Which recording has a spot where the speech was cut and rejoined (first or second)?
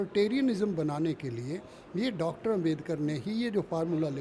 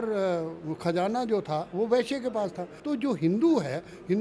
second